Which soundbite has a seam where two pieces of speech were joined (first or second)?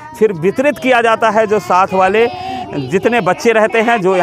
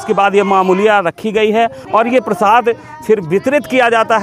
second